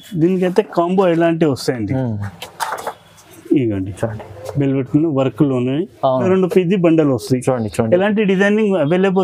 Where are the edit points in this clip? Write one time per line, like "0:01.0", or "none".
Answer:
0:06.2

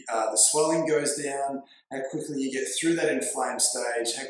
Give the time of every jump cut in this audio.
none

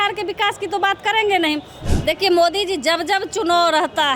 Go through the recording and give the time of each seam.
0:01.8

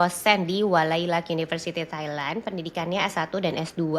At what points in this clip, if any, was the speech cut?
none

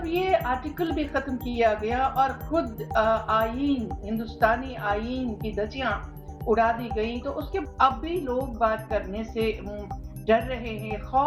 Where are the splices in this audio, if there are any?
0:07.6

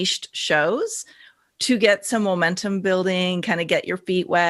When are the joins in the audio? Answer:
none

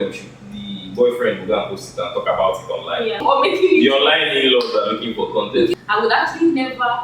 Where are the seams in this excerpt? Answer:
0:03.2
0:05.7

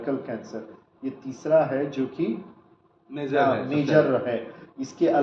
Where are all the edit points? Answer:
none

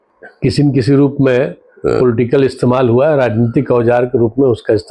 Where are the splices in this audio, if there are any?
none

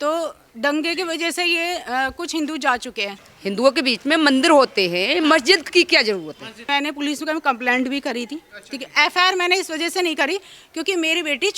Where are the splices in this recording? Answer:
0:03.2
0:06.7

